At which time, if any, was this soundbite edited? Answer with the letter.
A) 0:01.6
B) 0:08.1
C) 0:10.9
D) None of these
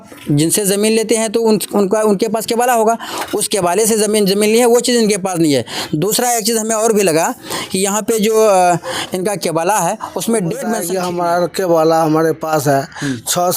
C